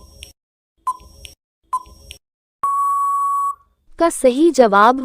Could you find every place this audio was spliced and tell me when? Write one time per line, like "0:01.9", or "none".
0:03.9